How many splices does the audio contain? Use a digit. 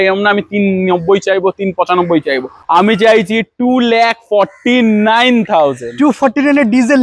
0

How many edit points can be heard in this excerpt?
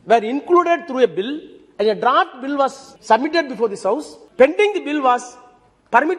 2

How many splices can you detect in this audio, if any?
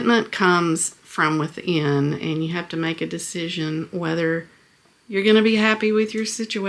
0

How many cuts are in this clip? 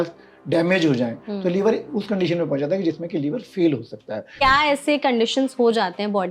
1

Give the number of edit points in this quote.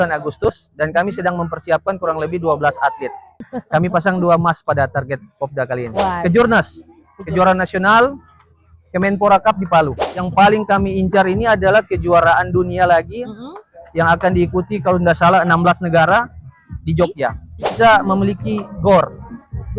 4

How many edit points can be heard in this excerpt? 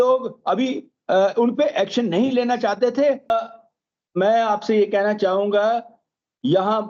1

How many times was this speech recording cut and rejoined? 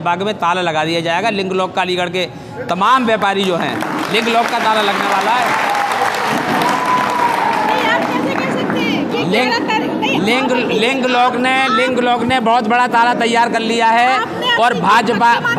0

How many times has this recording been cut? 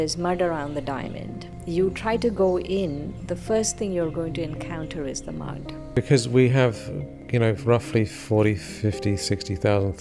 2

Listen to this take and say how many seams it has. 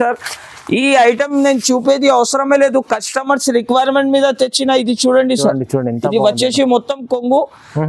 0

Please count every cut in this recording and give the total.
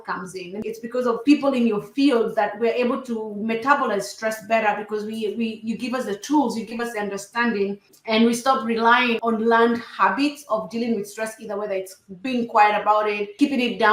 2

